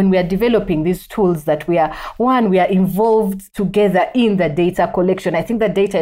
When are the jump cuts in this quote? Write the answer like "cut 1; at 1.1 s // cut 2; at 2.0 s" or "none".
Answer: none